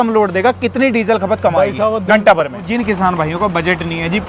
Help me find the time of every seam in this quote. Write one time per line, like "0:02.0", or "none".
0:02.6